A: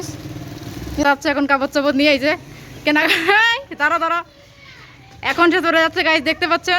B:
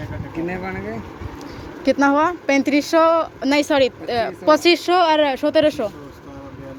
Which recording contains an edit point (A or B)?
A